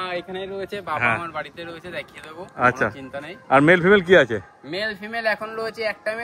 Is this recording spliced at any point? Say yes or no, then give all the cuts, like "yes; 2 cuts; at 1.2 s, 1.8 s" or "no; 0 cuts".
no; 0 cuts